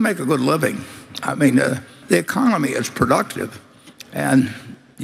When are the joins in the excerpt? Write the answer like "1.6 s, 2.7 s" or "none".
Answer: 2.0 s